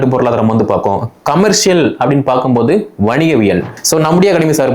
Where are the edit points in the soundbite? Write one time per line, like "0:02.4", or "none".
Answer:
0:03.7